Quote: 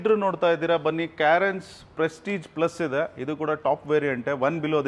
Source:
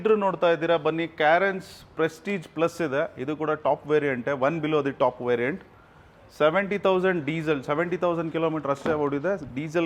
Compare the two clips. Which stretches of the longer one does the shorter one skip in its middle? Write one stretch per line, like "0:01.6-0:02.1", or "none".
none